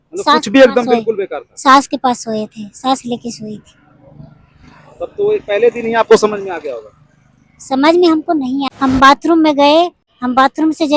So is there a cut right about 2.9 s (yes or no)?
no